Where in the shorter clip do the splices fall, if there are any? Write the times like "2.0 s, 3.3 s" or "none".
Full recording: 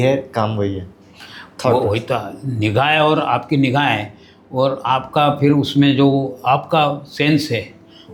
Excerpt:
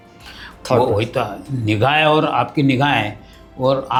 none